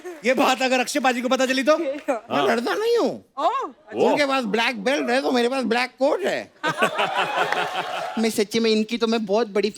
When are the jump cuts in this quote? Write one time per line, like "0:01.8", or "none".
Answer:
0:08.0